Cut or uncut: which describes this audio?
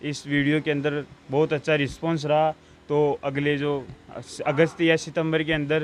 uncut